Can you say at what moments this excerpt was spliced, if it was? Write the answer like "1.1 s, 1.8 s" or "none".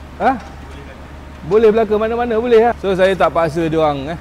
2.8 s